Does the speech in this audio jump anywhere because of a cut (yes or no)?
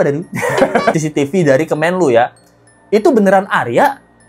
yes